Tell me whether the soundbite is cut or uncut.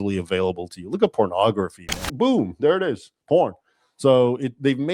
cut